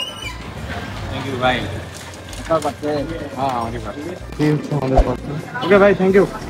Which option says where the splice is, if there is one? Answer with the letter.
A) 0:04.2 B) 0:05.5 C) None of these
A